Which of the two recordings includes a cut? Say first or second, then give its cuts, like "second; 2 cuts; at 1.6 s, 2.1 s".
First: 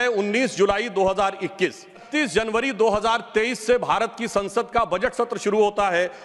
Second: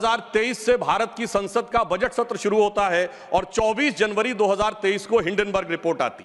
first; 1 cut; at 2.1 s